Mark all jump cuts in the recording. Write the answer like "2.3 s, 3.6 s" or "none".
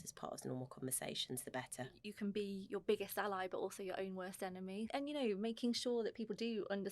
2.0 s, 4.9 s